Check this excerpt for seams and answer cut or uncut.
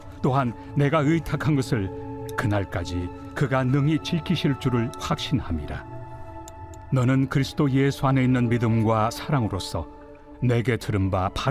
cut